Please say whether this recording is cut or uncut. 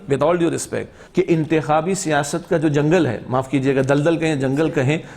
cut